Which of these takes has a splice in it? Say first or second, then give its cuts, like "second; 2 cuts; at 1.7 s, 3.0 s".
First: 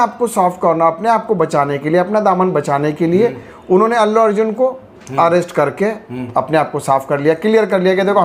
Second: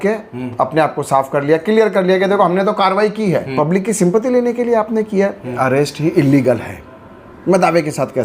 second; 2 cuts; at 3.5 s, 5.6 s